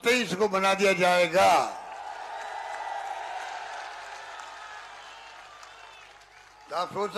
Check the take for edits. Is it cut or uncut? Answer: uncut